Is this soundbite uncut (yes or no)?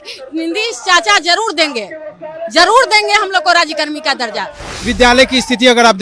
no